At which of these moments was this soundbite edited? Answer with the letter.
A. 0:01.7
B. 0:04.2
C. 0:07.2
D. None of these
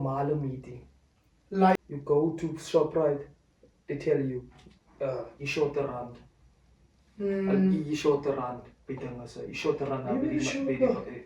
A